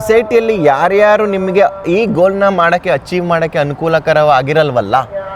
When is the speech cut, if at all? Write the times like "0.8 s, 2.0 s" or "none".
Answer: none

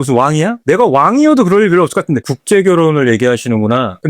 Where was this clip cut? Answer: 2.2 s

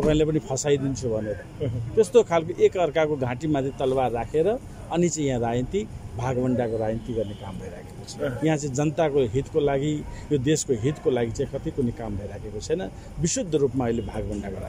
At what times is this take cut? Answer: none

